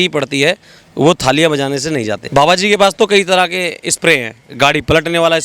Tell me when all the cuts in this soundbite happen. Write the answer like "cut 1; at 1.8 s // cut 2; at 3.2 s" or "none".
cut 1; at 2.2 s